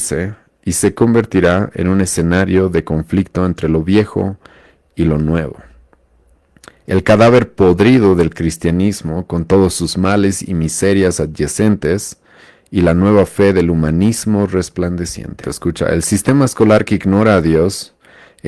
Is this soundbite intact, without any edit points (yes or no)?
no